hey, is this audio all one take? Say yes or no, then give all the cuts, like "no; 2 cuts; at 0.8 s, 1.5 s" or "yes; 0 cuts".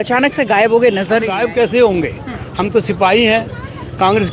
no; 1 cut; at 1.5 s